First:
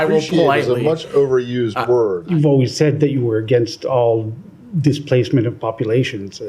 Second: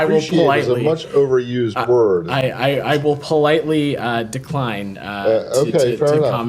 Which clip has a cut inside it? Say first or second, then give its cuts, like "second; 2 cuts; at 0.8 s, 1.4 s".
first; 1 cut; at 2.2 s